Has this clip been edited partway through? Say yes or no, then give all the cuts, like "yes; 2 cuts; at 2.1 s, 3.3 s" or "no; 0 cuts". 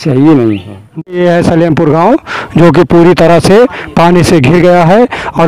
yes; 1 cut; at 1.0 s